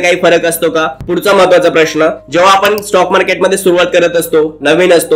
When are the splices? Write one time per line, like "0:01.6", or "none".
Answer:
0:01.0